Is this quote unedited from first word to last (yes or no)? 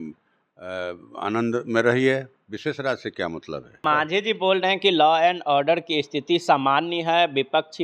no